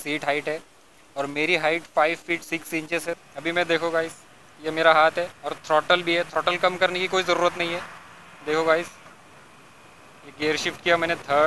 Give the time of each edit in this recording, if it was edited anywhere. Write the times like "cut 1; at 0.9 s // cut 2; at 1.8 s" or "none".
cut 1; at 3.1 s